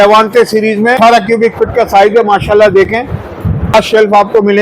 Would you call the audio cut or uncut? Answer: cut